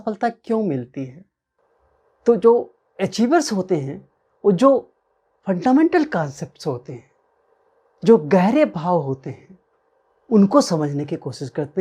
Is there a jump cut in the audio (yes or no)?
yes